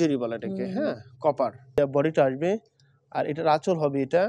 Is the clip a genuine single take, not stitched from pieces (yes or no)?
no